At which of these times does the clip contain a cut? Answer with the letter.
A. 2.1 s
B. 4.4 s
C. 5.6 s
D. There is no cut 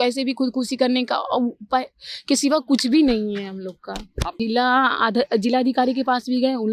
B